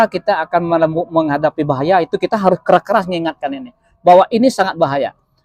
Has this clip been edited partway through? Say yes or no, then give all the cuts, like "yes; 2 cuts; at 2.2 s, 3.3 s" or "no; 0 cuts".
no; 0 cuts